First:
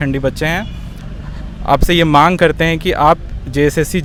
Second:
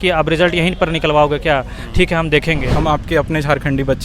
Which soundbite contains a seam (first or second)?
second